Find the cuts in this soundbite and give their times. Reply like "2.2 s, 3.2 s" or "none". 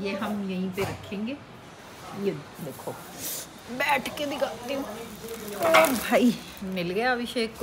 6.5 s